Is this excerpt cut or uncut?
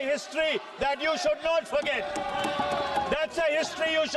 uncut